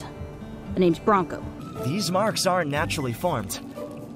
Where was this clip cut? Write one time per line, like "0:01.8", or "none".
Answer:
0:01.7